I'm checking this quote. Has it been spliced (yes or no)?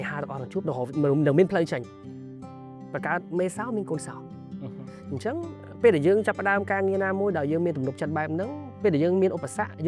no